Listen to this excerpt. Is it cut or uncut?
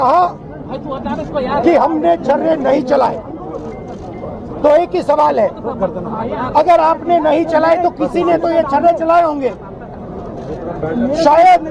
uncut